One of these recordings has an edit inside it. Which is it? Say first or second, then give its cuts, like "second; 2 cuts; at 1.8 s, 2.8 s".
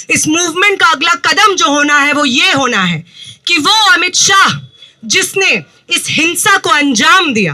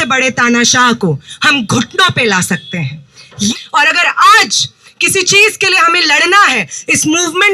second; 1 cut; at 3.4 s